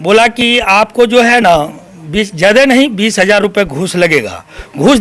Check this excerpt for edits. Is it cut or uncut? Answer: uncut